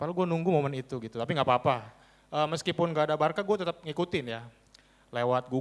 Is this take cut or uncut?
uncut